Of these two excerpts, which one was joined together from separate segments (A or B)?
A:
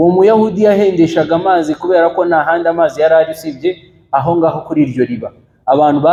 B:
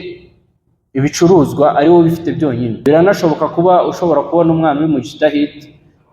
B